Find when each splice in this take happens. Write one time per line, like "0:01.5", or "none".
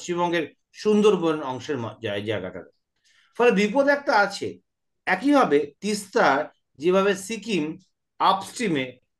none